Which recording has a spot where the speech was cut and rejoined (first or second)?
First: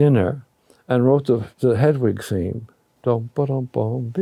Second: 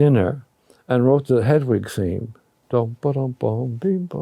second